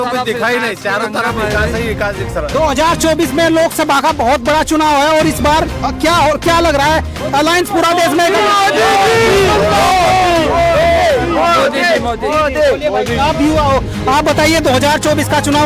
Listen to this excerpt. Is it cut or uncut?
uncut